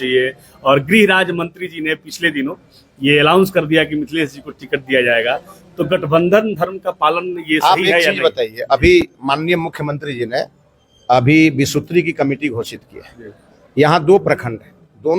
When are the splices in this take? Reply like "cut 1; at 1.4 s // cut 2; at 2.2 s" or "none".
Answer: none